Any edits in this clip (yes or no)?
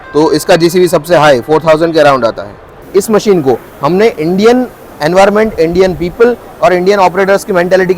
yes